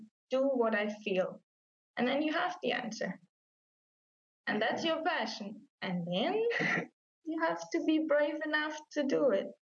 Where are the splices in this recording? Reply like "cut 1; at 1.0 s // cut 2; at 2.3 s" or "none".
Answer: none